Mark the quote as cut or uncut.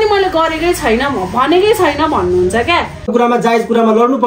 cut